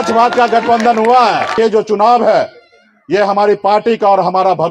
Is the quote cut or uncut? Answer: cut